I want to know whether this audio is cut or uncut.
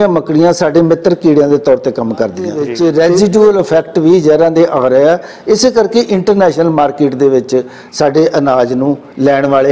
cut